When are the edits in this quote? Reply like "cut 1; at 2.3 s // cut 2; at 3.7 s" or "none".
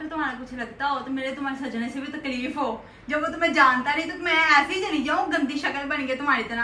none

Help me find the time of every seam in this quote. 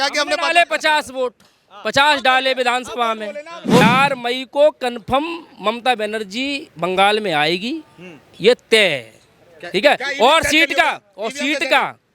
cut 1; at 3.8 s

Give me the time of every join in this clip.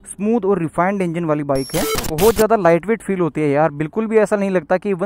cut 1; at 2.0 s

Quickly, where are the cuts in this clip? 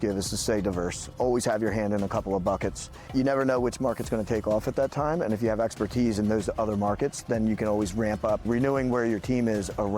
cut 1; at 1.1 s // cut 2; at 3.1 s // cut 3; at 8.4 s

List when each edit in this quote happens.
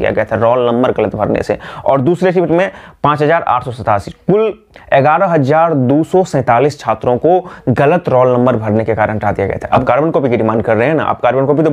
cut 1; at 9.7 s

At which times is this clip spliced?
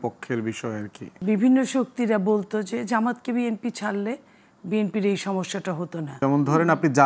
cut 1; at 1.0 s // cut 2; at 6.0 s

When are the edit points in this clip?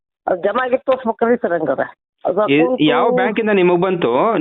cut 1; at 2.0 s

